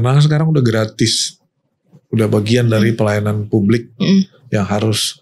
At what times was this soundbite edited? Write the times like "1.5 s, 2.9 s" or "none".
none